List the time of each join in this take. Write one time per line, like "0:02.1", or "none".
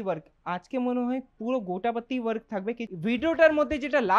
0:02.9